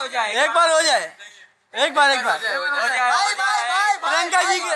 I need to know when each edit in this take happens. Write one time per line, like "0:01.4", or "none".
none